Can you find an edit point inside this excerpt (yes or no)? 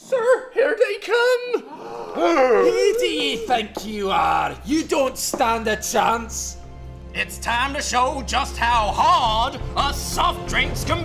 yes